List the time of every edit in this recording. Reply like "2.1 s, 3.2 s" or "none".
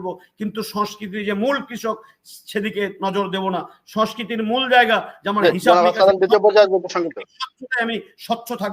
none